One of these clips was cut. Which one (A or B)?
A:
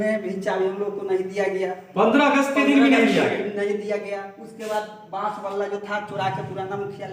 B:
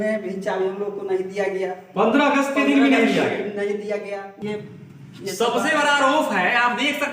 B